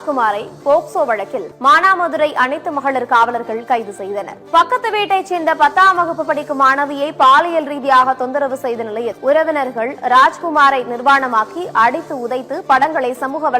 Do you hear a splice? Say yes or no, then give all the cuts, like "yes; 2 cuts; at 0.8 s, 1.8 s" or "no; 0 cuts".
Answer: yes; 3 cuts; at 1.4 s, 4.3 s, 9.1 s